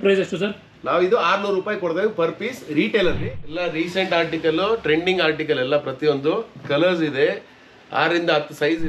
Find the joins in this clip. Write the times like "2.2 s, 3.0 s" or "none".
3.3 s